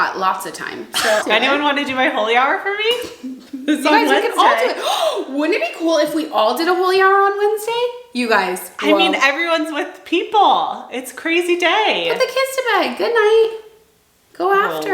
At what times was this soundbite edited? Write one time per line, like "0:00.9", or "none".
0:01.2